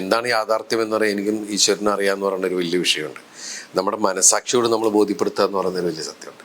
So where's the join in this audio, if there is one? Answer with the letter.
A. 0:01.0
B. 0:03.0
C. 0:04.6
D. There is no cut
D